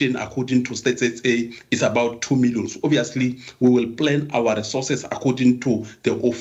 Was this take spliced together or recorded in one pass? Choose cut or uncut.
uncut